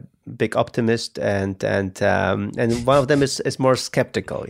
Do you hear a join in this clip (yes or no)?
no